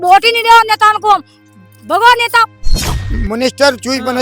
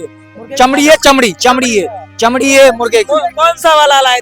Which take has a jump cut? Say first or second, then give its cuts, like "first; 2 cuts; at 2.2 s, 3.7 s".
first; 1 cut; at 3.0 s